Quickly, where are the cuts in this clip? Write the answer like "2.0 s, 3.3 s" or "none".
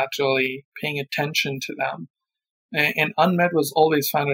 none